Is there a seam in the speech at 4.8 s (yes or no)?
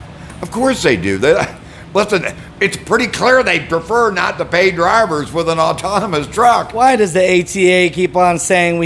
no